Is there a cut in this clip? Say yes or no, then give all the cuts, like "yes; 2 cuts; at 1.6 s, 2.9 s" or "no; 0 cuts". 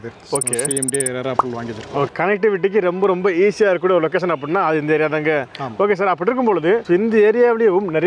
yes; 1 cut; at 2.1 s